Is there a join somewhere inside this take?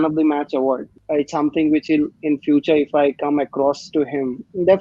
yes; 1 cut; at 0.9 s

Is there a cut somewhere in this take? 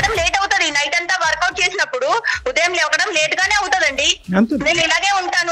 no; 0 cuts

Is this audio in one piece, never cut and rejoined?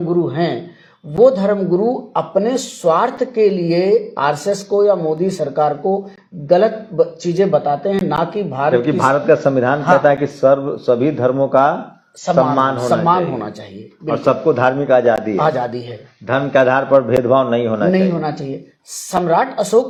yes; 0 cuts

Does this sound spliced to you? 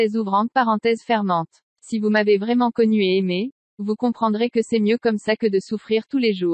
yes; 1 cut; at 1.6 s

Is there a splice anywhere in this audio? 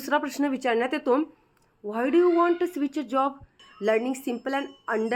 yes; 1 cut; at 3.6 s

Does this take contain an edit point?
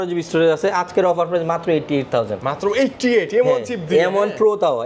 no; 0 cuts

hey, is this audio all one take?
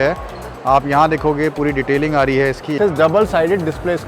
no; 1 cut; at 2.8 s

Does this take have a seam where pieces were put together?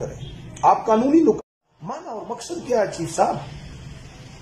yes; 1 cut; at 1.4 s

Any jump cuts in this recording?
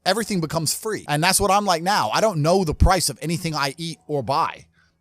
yes; 1 cut; at 1.0 s

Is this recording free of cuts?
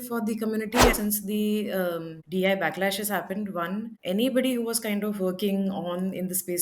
no; 3 cuts; at 0.9 s, 2.1 s, 3.9 s

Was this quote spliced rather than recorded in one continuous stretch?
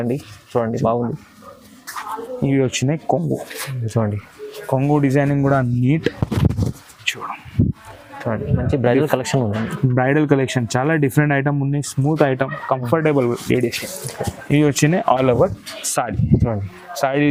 no; 0 cuts

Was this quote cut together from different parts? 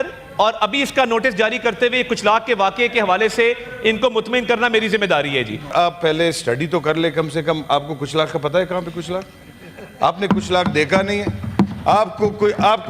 yes; 1 cut; at 5.7 s

